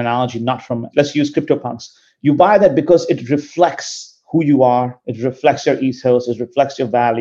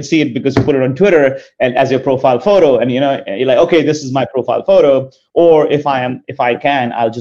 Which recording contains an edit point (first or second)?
first